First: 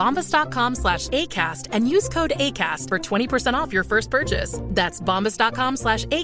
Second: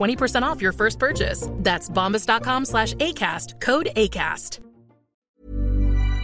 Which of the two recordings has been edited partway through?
second; 1 cut; at 5.3 s

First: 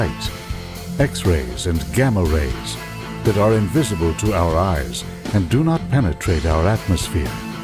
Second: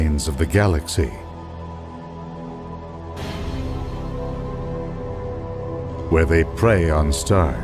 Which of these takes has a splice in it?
first; 1 cut; at 5.7 s

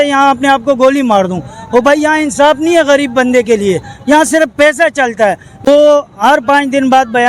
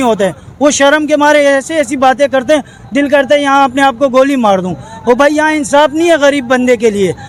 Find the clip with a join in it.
first; 1 cut; at 5.7 s

